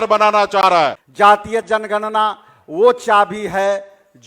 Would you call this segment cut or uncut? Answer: cut